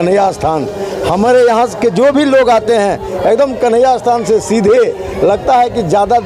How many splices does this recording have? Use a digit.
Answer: 0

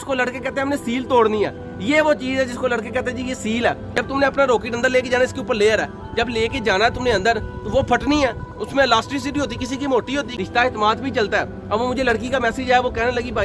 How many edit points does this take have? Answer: 2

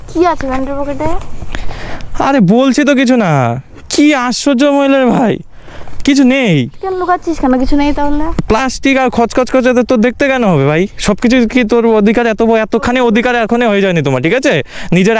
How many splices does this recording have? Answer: 0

